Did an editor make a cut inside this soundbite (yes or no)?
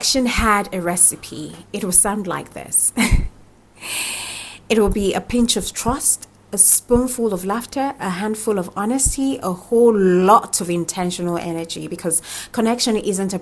no